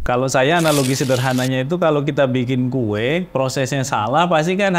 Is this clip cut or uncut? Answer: uncut